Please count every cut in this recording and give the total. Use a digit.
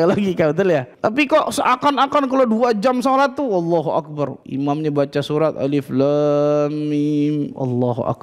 2